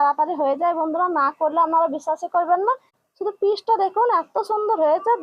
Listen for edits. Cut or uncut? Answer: cut